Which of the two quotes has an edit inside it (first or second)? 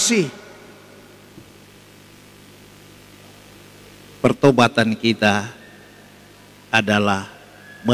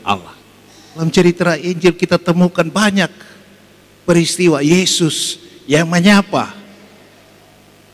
second